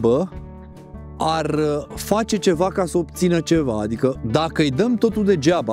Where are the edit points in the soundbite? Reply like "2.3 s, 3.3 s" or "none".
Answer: 4.2 s